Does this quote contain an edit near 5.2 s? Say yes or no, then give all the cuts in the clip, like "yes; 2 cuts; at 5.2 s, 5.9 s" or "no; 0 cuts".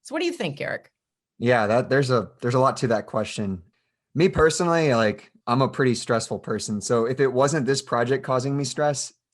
no; 1 cut; at 3.7 s